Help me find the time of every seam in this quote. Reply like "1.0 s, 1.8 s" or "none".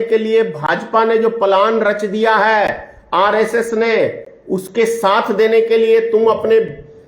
none